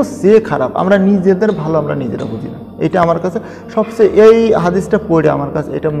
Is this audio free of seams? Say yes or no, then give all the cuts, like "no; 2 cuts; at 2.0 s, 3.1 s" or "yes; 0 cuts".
yes; 0 cuts